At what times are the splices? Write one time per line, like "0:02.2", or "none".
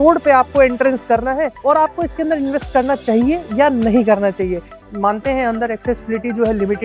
0:01.5
0:04.8